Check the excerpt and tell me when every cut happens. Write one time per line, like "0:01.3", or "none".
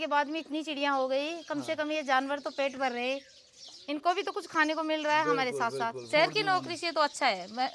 0:06.0